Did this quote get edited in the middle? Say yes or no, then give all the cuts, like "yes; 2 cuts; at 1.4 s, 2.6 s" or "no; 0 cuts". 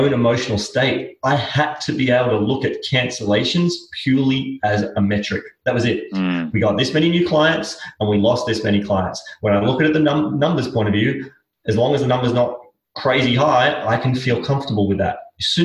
no; 0 cuts